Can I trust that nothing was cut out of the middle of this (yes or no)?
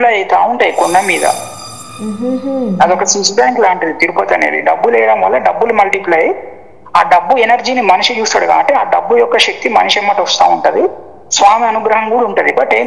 yes